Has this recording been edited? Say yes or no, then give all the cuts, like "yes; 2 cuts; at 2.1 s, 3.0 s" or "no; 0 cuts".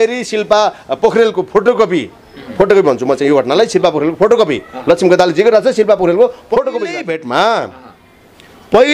yes; 1 cut; at 6.9 s